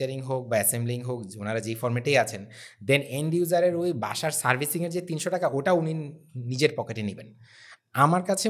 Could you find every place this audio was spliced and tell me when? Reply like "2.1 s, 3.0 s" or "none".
none